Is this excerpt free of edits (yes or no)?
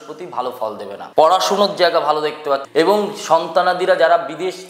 no